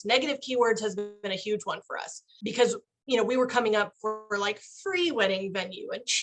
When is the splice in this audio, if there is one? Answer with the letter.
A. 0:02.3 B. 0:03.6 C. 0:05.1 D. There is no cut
A